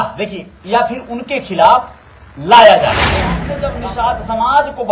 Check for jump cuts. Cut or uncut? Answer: cut